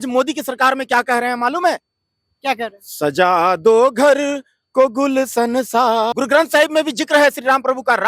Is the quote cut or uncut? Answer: cut